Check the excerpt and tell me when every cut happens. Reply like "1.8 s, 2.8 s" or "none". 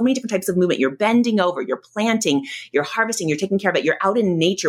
none